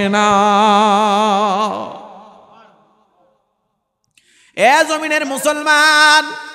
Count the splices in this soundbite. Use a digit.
0